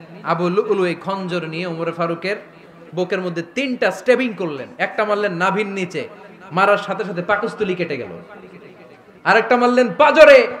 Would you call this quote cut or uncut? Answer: uncut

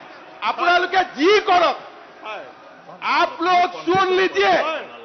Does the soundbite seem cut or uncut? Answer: uncut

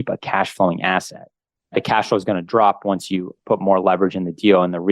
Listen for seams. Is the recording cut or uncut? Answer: cut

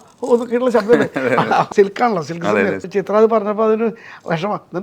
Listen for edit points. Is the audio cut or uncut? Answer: cut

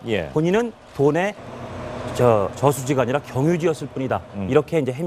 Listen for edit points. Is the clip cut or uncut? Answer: cut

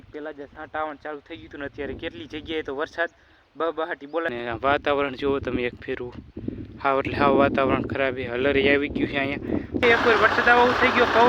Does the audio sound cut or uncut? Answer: cut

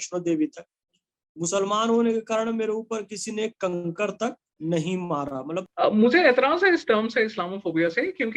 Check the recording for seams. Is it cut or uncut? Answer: cut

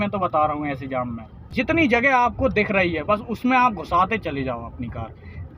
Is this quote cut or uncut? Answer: cut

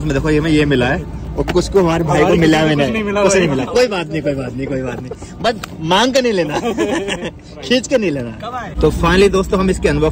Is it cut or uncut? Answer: uncut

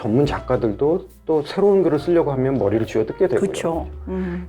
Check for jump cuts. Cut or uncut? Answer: uncut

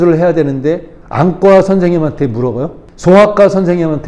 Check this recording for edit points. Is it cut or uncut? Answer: cut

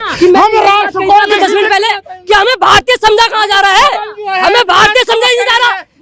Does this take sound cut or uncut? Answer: uncut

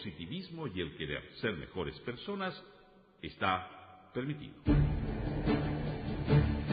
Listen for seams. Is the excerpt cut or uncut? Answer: cut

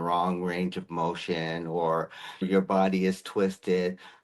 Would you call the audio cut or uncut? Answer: cut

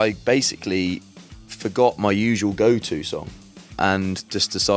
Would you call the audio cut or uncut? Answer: cut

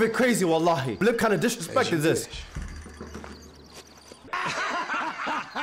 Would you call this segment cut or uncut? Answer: cut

